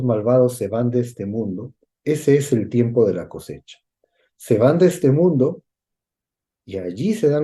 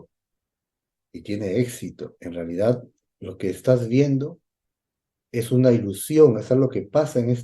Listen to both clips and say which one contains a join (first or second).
second